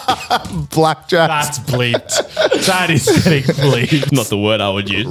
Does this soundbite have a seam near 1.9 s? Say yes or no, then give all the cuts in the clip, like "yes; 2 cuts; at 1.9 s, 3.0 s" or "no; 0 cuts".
no; 1 cut; at 4.1 s